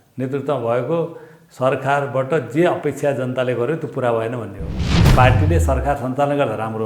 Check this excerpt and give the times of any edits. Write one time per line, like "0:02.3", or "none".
0:05.1